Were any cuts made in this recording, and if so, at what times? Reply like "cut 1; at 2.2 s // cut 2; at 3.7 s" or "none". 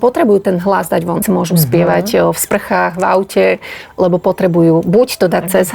cut 1; at 1.2 s